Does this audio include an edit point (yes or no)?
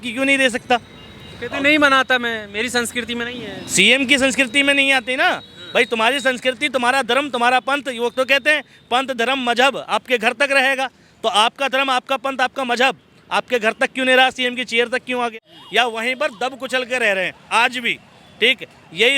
yes